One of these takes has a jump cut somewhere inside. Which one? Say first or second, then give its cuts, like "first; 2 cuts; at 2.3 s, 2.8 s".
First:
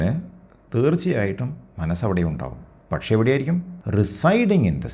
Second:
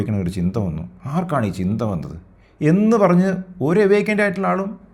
first; 1 cut; at 3.8 s